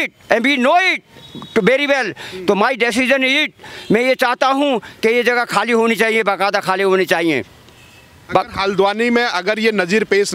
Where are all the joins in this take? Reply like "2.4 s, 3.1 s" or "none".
none